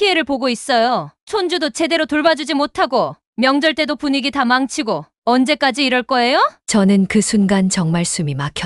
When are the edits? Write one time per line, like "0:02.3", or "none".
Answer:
none